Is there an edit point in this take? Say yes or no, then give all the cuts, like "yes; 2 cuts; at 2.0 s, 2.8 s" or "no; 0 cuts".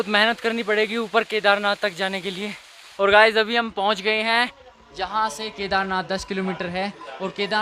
yes; 1 cut; at 2.8 s